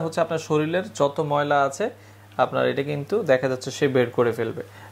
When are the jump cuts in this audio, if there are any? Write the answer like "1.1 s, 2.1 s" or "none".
none